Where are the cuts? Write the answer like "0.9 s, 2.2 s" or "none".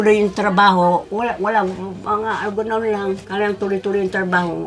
1.1 s, 3.2 s